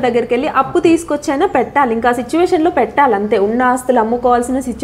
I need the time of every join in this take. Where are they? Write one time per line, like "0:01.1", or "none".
none